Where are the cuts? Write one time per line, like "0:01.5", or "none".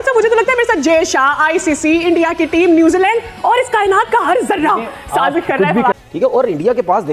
0:06.1